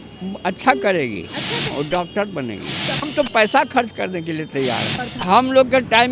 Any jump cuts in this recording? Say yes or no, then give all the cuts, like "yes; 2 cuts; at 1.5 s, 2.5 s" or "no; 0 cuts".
yes; 3 cuts; at 1.7 s, 3.1 s, 5.1 s